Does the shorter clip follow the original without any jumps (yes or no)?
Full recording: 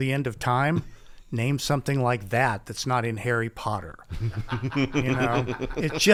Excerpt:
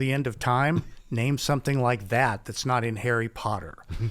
no